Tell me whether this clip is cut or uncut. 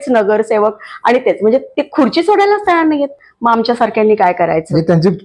uncut